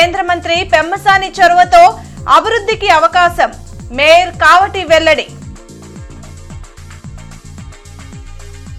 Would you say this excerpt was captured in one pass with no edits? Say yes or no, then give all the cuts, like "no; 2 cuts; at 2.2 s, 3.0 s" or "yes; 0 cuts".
yes; 0 cuts